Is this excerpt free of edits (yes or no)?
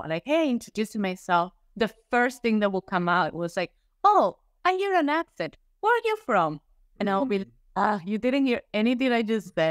yes